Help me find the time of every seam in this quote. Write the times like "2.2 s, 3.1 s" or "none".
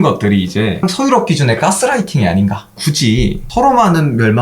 2.8 s